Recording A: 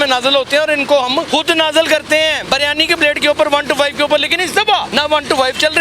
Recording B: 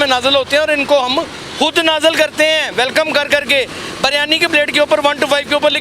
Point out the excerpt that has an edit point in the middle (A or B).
A